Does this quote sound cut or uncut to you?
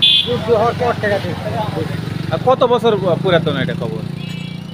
uncut